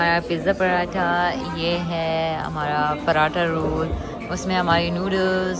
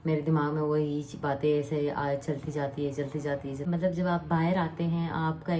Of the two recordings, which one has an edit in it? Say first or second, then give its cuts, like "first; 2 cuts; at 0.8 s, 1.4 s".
second; 1 cut; at 3.7 s